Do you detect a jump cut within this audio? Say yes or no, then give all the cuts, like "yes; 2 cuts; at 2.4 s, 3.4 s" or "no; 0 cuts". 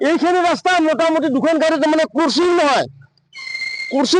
yes; 1 cut; at 1.6 s